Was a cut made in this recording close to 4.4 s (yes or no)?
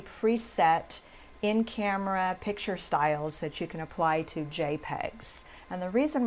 no